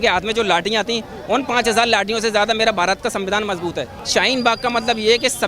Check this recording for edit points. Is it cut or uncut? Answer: cut